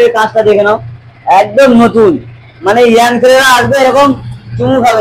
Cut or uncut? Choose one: uncut